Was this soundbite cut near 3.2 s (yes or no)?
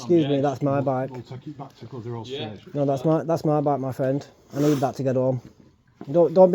no